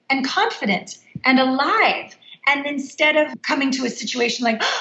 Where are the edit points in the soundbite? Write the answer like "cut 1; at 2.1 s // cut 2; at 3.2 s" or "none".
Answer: cut 1; at 3.3 s